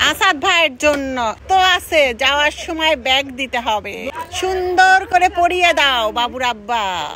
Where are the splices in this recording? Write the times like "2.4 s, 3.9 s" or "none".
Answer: 1.4 s, 4.1 s